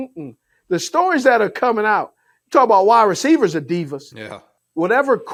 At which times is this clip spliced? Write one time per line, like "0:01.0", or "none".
none